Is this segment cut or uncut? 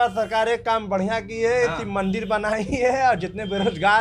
uncut